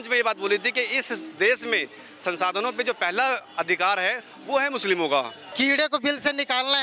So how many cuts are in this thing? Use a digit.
1